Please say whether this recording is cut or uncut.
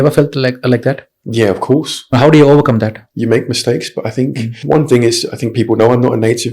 cut